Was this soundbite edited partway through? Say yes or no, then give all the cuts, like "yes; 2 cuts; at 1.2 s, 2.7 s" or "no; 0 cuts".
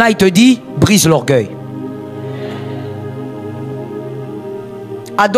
no; 0 cuts